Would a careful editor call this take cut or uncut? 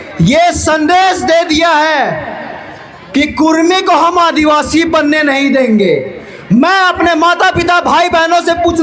uncut